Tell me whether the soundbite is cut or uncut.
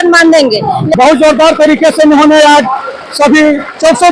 cut